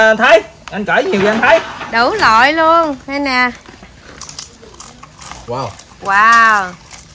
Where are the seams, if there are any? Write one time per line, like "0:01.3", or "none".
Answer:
0:03.9